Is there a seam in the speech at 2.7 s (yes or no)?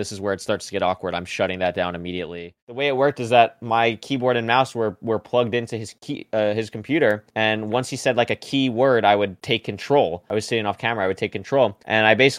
yes